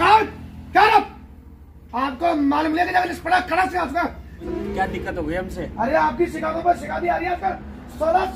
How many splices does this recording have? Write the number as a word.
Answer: one